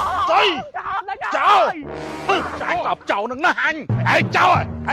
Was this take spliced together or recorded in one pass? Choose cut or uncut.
cut